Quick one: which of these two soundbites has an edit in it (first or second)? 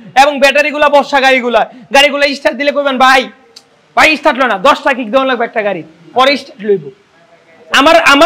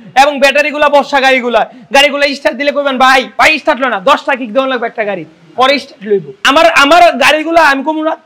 second